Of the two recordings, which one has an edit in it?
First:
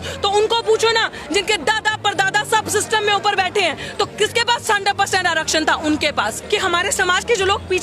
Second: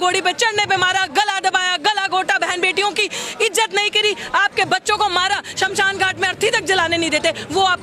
first; 1 cut; at 6.4 s

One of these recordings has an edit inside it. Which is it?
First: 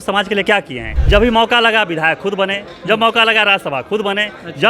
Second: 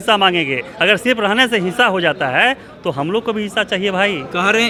first; 1 cut; at 0.9 s

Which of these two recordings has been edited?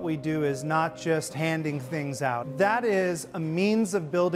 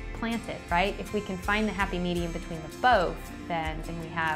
first; 1 cut; at 2.5 s

